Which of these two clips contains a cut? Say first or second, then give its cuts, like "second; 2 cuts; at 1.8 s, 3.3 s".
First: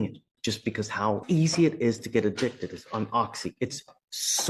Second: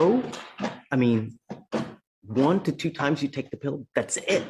first; 1 cut; at 1.2 s